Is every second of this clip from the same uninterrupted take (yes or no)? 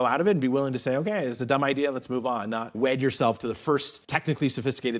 no